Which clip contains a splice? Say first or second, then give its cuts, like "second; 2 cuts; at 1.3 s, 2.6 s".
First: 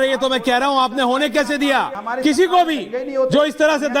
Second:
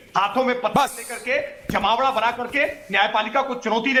first; 1 cut; at 2.0 s